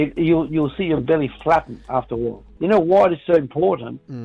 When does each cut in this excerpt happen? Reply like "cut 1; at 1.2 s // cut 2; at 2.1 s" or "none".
cut 1; at 2.5 s